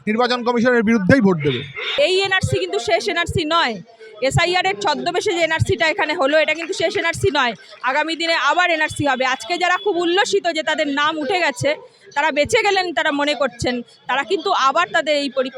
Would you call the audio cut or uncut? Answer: cut